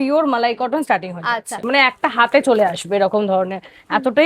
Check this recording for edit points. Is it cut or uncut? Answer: cut